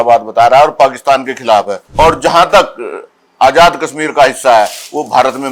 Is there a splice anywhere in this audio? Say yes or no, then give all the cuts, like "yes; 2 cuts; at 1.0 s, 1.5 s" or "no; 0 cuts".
yes; 1 cut; at 1.8 s